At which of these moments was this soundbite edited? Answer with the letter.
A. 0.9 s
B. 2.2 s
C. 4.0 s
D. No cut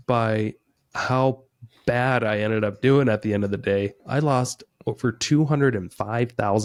D